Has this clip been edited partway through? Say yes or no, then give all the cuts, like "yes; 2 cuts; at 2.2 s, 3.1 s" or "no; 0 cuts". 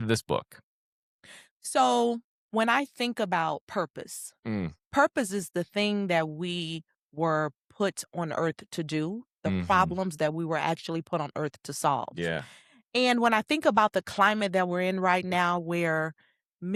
no; 0 cuts